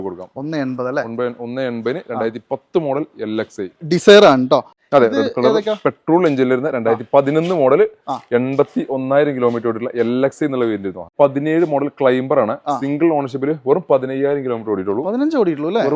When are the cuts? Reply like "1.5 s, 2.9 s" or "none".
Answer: 4.8 s, 11.1 s